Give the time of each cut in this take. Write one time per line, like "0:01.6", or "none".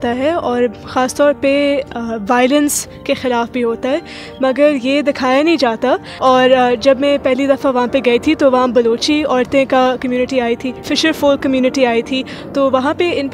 0:06.1
0:10.8